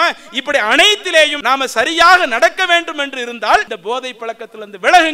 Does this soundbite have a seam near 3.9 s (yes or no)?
no